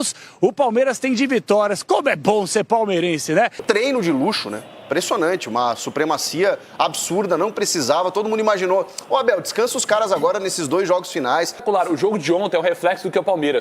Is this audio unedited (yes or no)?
no